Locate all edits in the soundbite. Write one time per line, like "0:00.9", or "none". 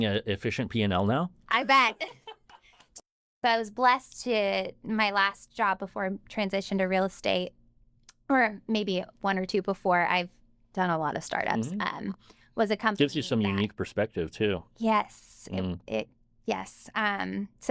0:03.3